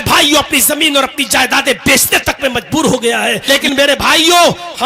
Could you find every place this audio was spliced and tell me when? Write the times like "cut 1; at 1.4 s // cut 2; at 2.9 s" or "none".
cut 1; at 3.5 s